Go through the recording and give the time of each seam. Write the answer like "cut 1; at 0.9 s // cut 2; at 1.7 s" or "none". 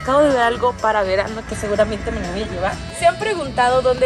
cut 1; at 2.9 s